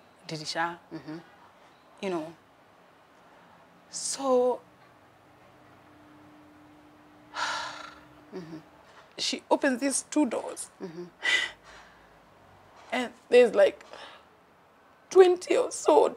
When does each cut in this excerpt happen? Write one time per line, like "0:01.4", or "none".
0:08.9